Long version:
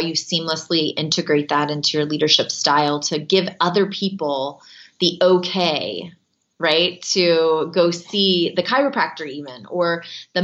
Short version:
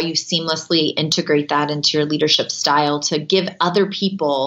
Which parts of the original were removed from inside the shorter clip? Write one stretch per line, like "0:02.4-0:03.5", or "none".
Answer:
none